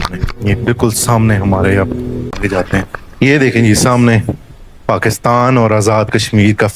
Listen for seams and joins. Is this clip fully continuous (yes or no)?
no